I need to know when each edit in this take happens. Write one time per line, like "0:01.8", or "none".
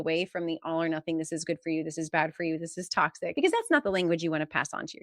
0:03.3

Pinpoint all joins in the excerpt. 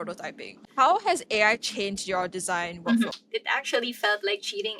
0:03.2

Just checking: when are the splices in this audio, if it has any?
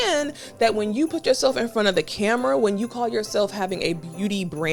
none

